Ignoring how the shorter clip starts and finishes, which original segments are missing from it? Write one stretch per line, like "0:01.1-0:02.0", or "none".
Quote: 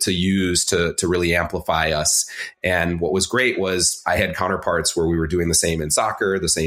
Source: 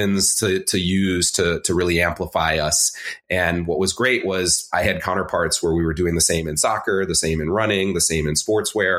none